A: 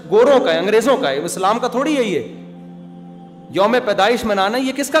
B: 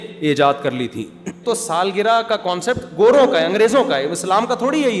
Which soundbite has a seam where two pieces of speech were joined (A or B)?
B